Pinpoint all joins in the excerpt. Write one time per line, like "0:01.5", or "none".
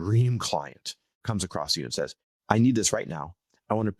0:01.2
0:02.3